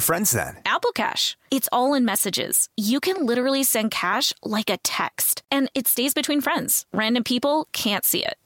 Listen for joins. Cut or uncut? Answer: uncut